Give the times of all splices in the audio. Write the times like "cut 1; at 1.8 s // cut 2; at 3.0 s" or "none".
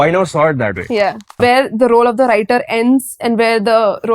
cut 1; at 1.4 s